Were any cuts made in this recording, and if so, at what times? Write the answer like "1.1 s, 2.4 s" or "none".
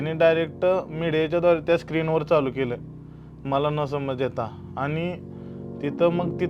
none